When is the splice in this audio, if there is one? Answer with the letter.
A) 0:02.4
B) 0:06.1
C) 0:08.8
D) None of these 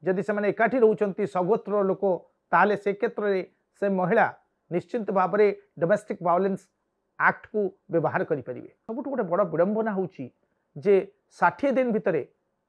C